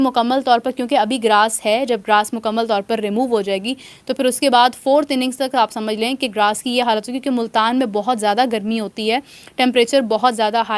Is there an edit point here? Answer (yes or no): no